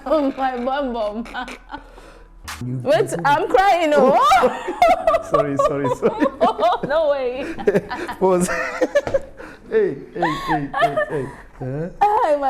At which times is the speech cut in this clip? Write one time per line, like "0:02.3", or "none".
0:02.6

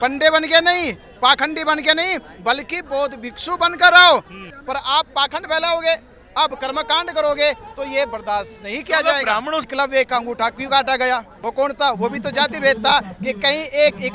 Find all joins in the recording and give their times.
0:04.5
0:09.7
0:11.4

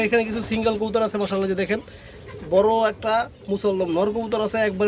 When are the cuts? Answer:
none

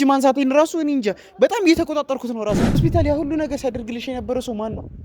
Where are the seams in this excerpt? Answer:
0:02.7

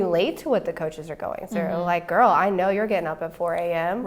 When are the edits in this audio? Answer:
none

